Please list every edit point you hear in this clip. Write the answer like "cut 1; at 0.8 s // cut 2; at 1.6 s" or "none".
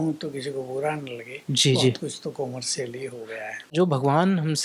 cut 1; at 3.7 s